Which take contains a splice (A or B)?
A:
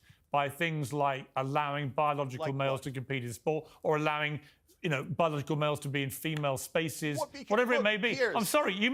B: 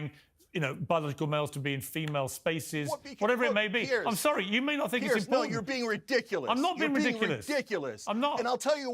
B